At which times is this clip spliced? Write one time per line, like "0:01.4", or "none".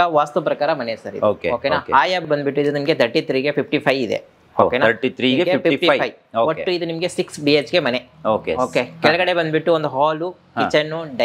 none